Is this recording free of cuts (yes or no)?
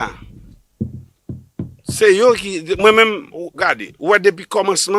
yes